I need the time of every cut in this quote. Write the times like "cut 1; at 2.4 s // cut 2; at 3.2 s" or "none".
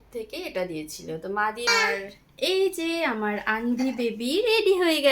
cut 1; at 1.6 s